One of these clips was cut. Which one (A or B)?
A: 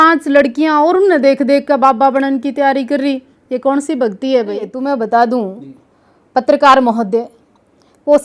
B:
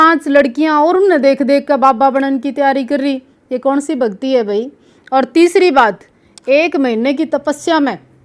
A